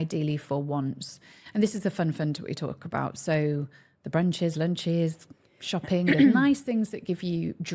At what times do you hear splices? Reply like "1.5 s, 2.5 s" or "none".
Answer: none